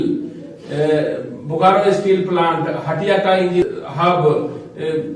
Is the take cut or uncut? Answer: cut